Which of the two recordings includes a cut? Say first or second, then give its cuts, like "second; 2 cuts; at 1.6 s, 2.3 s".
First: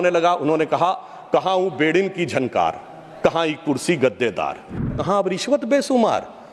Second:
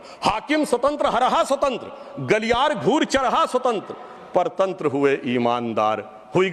first; 1 cut; at 4.9 s